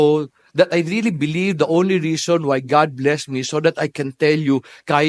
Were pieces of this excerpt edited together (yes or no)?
no